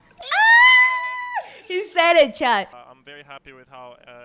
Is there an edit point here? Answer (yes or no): yes